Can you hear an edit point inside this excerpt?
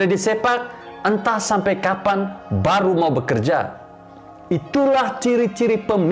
no; 0 cuts

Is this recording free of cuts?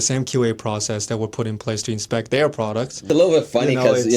no; 1 cut; at 3.0 s

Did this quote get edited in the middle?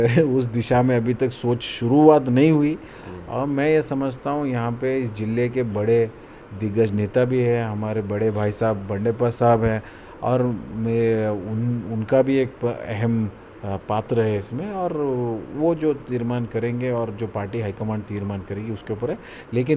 no; 0 cuts

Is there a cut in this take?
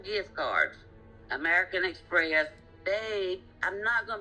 yes; 1 cut; at 2.6 s

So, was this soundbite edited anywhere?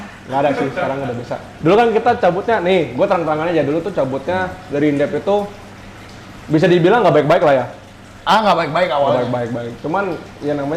no; 0 cuts

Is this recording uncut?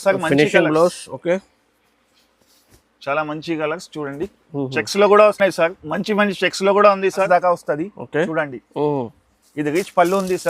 no; 1 cut; at 7.2 s

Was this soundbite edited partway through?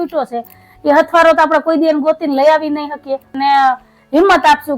yes; 1 cut; at 3.4 s

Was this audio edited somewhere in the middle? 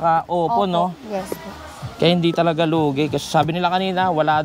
no; 0 cuts

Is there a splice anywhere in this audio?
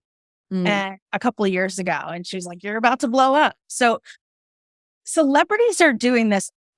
no; 0 cuts

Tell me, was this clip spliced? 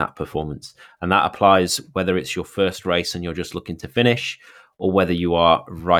no; 0 cuts

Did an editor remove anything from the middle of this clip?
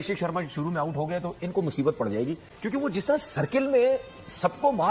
yes; 1 cut; at 2.4 s

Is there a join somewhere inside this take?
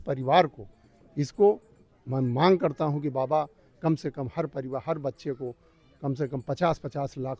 no; 0 cuts

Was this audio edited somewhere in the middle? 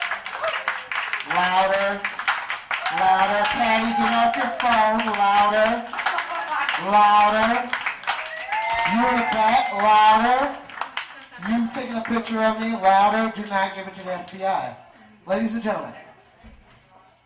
yes; 1 cut; at 16.1 s

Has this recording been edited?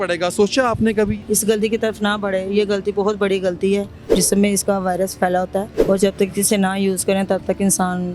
yes; 3 cuts; at 1.2 s, 4.0 s, 5.7 s

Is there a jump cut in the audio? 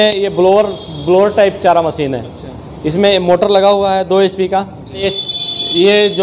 yes; 1 cut; at 5.0 s

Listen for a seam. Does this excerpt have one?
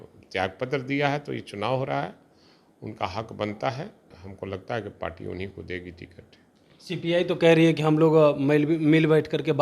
yes; 1 cut; at 4.2 s

